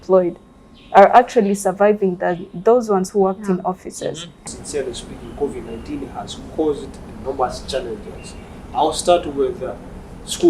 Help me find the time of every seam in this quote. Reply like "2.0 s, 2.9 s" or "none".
4.3 s